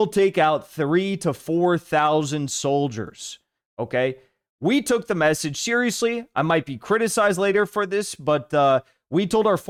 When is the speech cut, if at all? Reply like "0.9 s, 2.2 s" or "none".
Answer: none